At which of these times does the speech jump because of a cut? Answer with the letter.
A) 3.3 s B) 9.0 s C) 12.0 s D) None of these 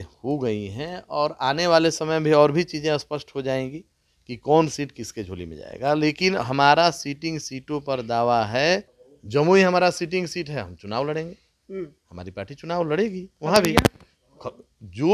B